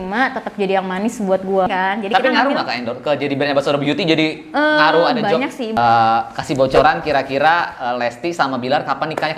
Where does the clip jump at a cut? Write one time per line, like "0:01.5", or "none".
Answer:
0:01.7
0:05.8